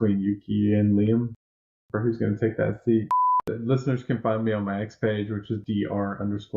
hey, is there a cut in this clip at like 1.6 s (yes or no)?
no